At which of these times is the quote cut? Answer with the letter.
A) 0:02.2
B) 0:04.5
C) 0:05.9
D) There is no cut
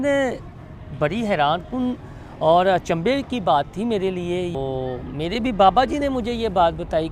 B